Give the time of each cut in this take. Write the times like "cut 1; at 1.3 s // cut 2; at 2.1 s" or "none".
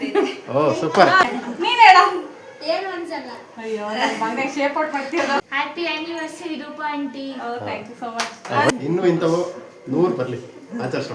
cut 1; at 1.4 s // cut 2; at 5.4 s // cut 3; at 8.7 s